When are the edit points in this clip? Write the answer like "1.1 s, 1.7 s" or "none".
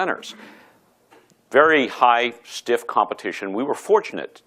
3.5 s